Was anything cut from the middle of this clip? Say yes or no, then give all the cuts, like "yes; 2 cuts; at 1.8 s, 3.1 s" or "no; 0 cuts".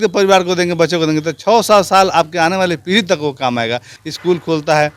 yes; 1 cut; at 3.9 s